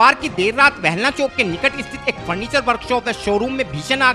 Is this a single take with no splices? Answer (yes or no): yes